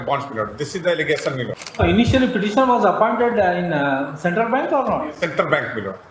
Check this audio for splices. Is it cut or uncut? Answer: cut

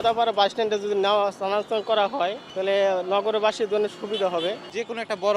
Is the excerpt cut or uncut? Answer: cut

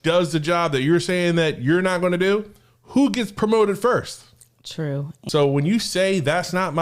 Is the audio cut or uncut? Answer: cut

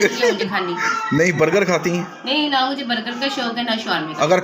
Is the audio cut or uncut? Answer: uncut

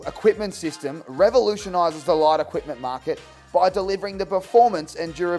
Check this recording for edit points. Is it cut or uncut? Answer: uncut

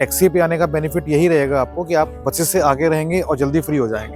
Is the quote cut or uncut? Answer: uncut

